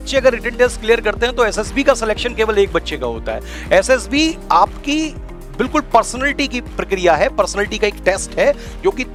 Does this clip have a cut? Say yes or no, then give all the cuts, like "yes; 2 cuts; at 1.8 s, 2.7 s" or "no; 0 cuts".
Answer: no; 0 cuts